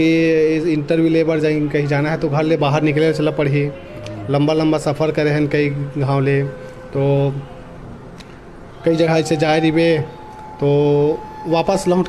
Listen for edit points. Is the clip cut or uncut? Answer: uncut